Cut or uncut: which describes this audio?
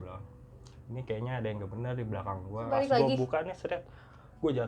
cut